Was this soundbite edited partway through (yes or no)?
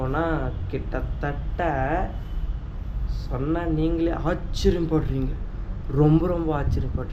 no